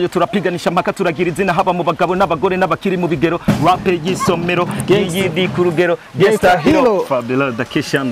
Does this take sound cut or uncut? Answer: uncut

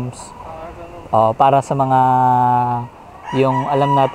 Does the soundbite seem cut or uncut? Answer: uncut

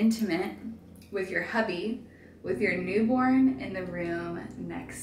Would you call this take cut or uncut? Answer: uncut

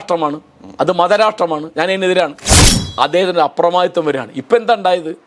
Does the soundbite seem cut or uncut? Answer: cut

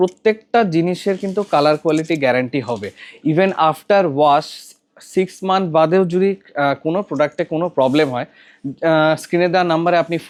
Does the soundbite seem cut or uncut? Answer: uncut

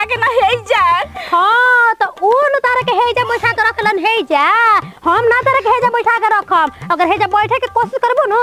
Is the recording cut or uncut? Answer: uncut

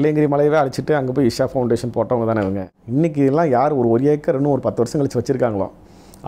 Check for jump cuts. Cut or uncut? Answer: cut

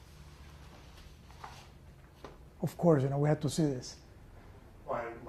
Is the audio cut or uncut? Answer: uncut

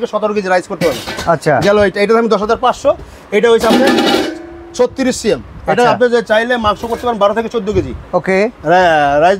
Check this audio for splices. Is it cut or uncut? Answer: uncut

